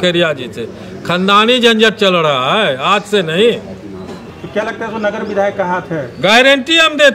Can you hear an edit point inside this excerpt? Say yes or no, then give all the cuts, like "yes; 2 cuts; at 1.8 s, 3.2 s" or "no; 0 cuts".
no; 0 cuts